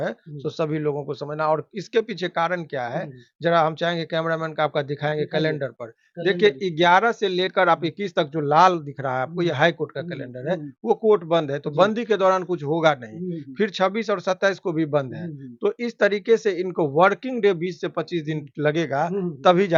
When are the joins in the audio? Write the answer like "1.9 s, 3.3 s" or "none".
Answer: none